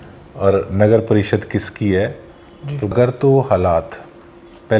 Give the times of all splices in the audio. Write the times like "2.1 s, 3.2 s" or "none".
2.9 s